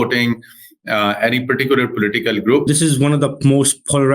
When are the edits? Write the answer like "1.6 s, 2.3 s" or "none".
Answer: 2.6 s